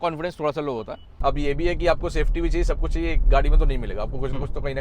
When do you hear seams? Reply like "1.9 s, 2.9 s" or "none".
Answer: 1.0 s